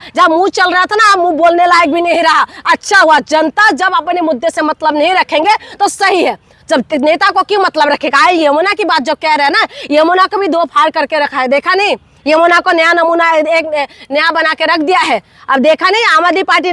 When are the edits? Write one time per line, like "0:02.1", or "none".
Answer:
none